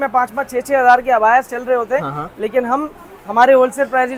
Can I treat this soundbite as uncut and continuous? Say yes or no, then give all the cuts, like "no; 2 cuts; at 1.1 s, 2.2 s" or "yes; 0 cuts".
yes; 0 cuts